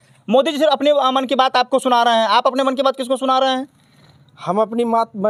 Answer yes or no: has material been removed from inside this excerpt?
no